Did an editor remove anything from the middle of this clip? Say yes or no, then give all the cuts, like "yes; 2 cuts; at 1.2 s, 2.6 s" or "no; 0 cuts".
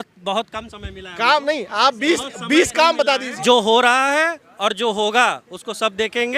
yes; 1 cut; at 3.3 s